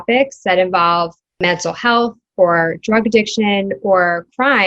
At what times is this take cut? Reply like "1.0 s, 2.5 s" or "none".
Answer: 1.4 s